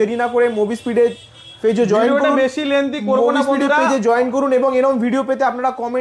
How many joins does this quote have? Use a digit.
0